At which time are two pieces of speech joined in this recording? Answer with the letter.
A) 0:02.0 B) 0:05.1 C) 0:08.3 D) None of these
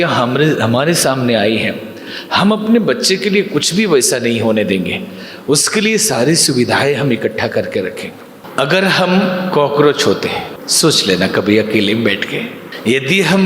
C